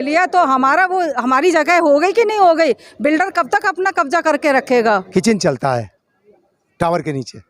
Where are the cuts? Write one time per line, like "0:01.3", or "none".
0:05.1